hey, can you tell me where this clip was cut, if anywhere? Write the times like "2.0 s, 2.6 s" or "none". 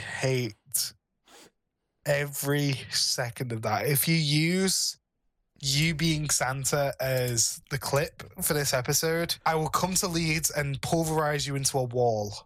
9.3 s